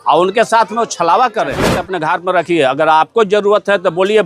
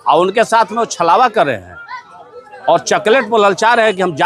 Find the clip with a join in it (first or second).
first